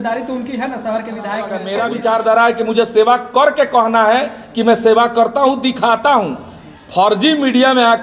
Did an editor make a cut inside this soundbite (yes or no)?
yes